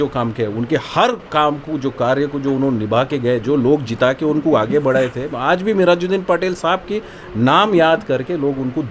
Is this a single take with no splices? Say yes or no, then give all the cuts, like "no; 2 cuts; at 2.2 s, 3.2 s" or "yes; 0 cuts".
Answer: yes; 0 cuts